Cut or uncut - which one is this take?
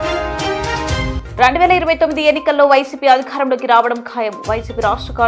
uncut